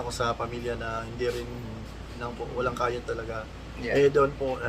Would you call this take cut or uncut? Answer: cut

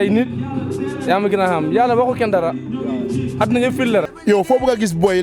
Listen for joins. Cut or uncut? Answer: cut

